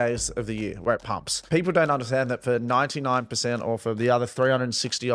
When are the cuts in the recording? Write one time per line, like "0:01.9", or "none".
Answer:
0:01.4